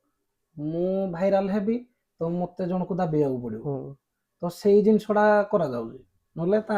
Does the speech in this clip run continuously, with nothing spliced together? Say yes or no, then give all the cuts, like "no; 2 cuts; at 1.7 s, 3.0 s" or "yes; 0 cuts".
yes; 0 cuts